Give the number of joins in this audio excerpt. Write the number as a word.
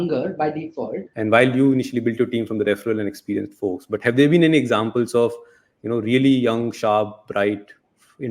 one